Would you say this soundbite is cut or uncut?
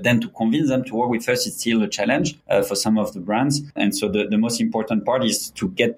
cut